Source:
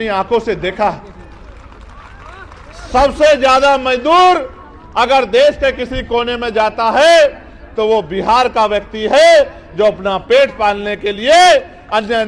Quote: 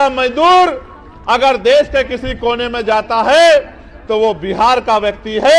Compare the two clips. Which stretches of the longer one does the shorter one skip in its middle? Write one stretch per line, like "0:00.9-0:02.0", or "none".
none